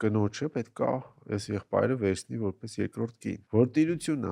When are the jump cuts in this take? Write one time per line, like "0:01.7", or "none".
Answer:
0:03.4